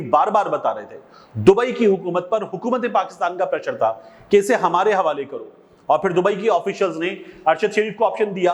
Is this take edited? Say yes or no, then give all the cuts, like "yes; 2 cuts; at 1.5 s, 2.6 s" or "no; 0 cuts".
no; 0 cuts